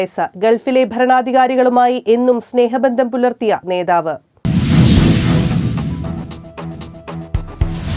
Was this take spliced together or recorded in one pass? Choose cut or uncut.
cut